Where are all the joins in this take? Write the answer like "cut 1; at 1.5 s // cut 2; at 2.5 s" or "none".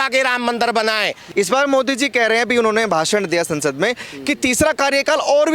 cut 1; at 1.2 s

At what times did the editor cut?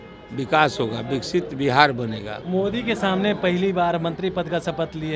cut 1; at 2.3 s

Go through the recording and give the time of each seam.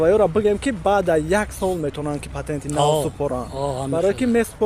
none

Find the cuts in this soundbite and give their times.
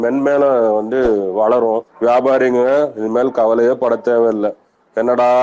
cut 1; at 1.9 s

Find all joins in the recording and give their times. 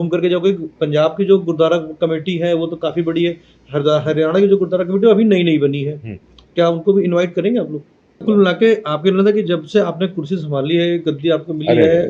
cut 1; at 8.2 s

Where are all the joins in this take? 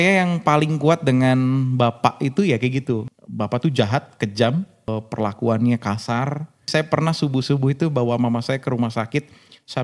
cut 1; at 3.1 s // cut 2; at 4.9 s // cut 3; at 6.7 s

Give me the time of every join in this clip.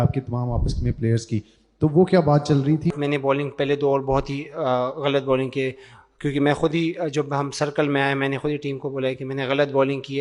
cut 1; at 2.9 s

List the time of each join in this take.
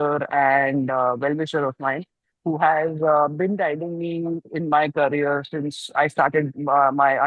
none

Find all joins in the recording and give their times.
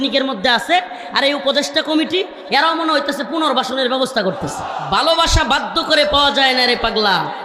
cut 1; at 4.7 s

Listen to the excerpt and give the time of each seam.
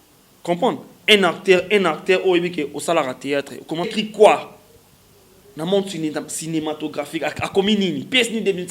cut 1; at 3.9 s

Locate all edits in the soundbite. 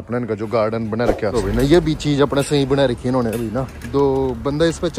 cut 1; at 1.3 s

